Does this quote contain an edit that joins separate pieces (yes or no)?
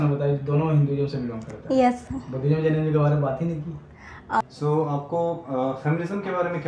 yes